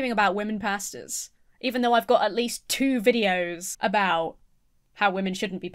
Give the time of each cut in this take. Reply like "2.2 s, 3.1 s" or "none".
3.6 s